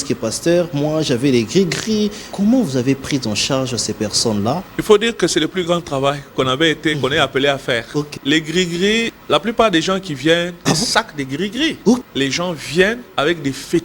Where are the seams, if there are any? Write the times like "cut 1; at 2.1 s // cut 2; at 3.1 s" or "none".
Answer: cut 1; at 2.2 s // cut 2; at 4.7 s // cut 3; at 8.1 s // cut 4; at 9.2 s // cut 5; at 10.6 s // cut 6; at 12.0 s // cut 7; at 13.0 s